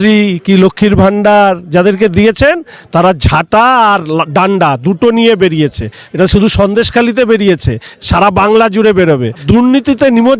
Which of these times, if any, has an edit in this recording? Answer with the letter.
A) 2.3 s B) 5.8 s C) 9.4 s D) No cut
C